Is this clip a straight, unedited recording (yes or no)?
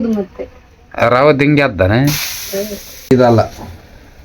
no